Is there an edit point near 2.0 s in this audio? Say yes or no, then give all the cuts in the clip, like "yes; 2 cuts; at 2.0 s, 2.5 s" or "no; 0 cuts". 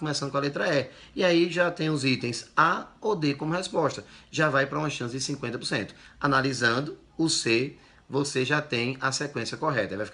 no; 0 cuts